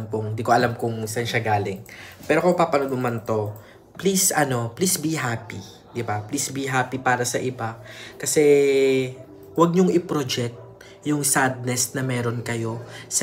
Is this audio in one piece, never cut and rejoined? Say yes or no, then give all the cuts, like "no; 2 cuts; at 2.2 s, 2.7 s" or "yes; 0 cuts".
yes; 0 cuts